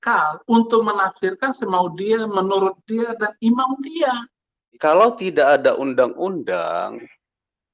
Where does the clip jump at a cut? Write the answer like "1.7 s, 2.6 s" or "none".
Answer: 4.7 s